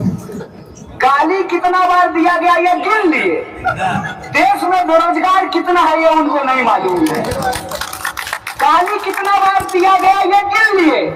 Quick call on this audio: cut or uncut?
uncut